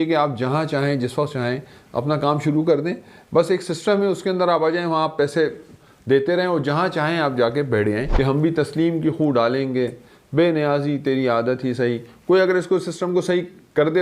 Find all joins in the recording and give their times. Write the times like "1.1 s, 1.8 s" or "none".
8.1 s